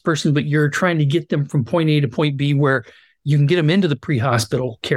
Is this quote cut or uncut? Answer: uncut